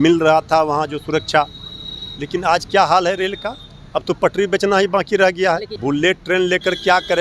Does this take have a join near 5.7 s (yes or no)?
yes